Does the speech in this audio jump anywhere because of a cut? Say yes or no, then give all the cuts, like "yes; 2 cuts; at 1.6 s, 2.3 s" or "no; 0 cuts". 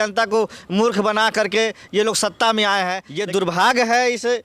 yes; 1 cut; at 3.1 s